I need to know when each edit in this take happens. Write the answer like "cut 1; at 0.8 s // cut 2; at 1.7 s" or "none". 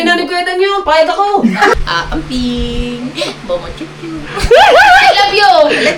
cut 1; at 1.8 s